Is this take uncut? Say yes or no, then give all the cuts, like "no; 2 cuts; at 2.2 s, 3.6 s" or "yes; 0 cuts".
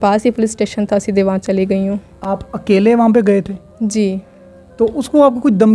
yes; 0 cuts